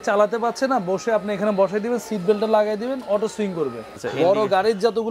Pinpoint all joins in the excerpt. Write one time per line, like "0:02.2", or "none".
0:03.9